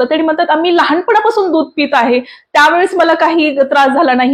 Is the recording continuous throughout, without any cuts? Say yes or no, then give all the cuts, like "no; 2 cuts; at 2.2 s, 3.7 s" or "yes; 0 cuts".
yes; 0 cuts